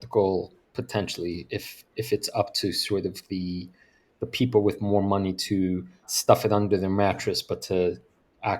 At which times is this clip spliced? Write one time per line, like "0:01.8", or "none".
0:06.1

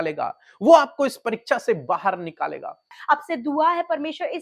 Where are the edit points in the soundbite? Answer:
0:02.9

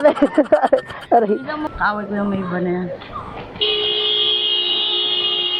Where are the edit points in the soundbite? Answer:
0:01.6

